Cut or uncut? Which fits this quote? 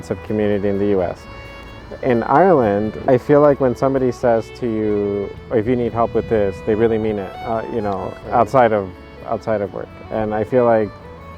cut